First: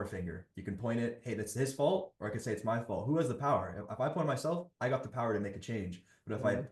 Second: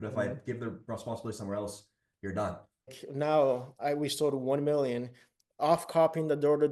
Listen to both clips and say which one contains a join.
second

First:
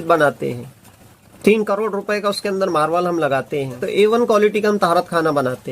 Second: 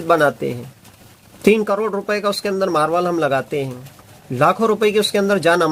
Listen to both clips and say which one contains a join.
first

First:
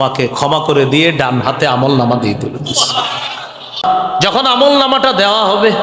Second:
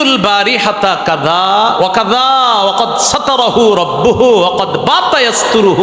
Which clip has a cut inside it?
first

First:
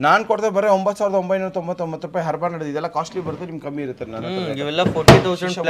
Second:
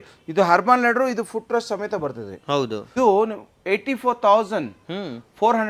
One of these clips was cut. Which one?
second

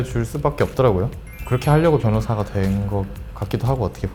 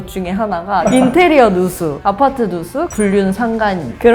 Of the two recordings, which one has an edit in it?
second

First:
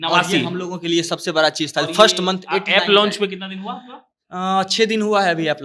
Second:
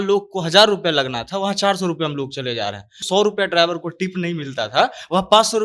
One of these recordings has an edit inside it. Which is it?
second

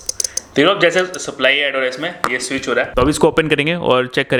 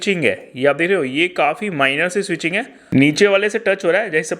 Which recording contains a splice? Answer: second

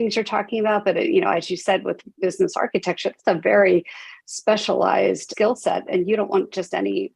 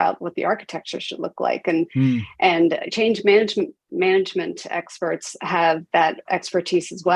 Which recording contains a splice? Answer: first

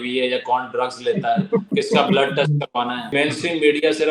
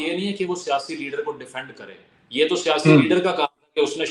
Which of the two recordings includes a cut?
first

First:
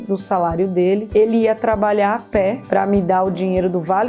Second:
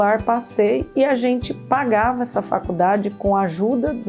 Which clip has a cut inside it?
first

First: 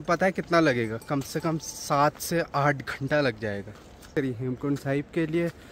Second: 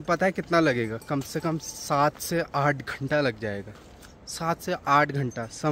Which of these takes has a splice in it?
first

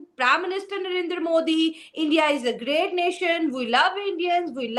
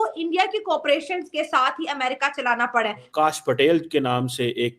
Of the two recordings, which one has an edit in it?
second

